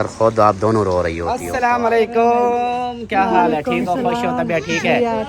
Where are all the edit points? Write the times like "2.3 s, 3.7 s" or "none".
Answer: 1.5 s